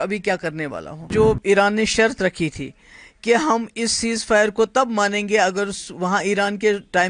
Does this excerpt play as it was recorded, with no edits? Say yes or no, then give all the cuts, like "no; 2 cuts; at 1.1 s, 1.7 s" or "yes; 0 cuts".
no; 1 cut; at 1.1 s